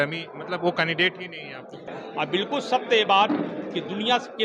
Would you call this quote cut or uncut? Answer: cut